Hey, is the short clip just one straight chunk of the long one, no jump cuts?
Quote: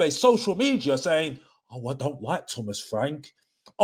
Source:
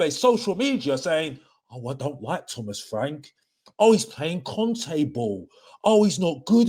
yes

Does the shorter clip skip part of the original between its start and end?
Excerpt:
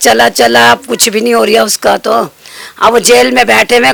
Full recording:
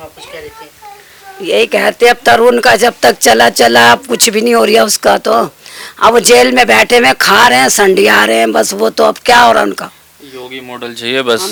no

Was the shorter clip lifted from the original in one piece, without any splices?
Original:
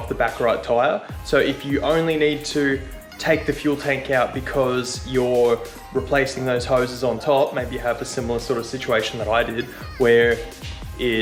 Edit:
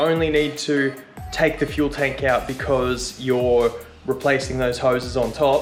yes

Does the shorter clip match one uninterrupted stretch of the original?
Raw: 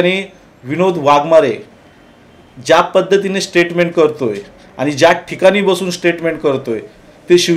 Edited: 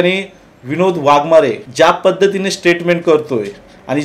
no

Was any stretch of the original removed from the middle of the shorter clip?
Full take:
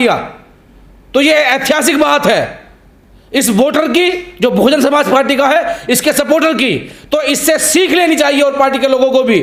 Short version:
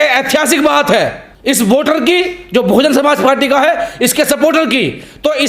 yes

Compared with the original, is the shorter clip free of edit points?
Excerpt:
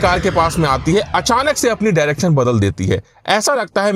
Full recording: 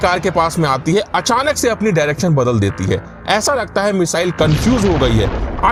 yes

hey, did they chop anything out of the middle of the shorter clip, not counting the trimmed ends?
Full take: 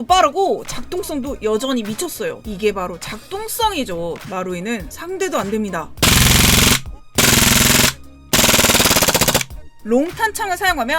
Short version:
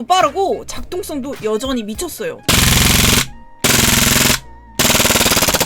yes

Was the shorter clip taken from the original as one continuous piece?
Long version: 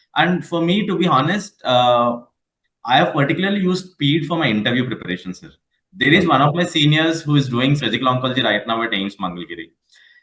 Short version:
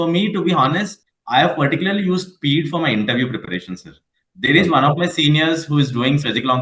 no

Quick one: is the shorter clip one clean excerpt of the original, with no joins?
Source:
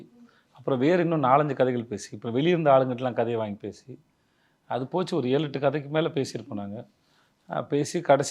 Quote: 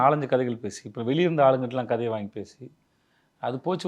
yes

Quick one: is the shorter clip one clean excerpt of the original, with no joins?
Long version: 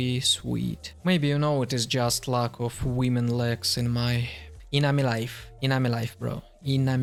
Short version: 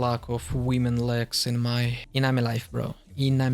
no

